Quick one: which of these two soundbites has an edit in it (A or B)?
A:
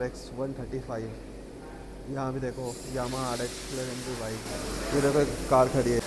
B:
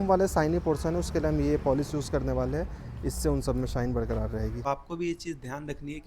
B